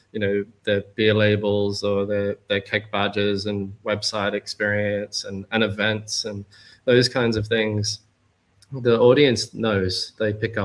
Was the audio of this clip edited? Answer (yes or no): no